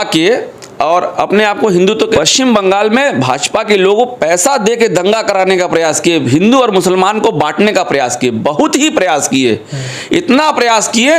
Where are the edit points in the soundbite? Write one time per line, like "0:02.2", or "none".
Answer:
0:01.9